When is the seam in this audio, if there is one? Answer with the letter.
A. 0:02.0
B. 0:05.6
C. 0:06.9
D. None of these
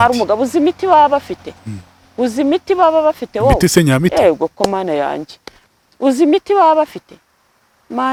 D